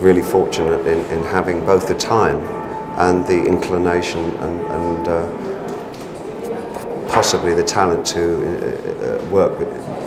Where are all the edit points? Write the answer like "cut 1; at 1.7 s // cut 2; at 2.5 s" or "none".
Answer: none